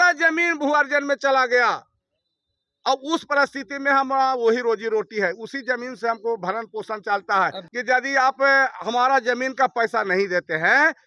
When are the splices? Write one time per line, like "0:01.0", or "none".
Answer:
0:07.7